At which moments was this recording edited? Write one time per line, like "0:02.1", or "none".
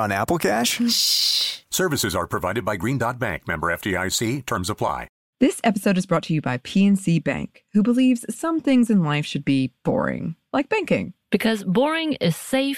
0:05.2